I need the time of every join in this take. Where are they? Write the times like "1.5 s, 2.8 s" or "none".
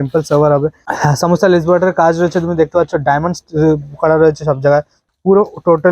1.0 s, 5.0 s